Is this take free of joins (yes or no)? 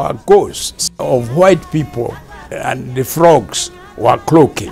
no